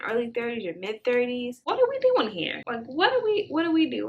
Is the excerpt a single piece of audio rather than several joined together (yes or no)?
yes